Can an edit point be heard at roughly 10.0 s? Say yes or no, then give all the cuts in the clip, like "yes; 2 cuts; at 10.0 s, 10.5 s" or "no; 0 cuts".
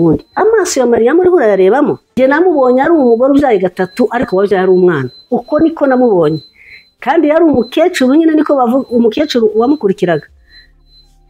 no; 1 cut; at 2.2 s